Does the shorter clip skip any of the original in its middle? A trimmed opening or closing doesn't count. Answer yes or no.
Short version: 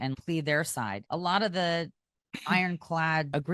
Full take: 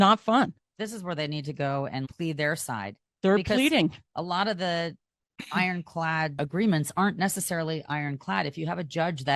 yes